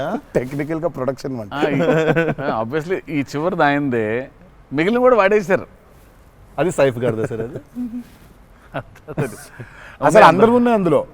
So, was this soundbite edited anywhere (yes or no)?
no